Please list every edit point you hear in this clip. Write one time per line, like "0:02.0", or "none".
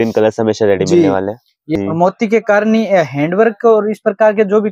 0:01.5